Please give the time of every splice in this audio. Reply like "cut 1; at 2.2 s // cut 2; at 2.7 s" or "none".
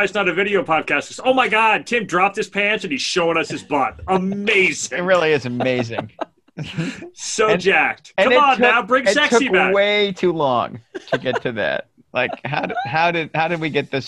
cut 1; at 12.0 s